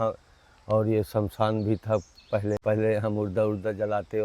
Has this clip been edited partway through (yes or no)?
yes